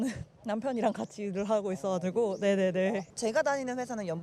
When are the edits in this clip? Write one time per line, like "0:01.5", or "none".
none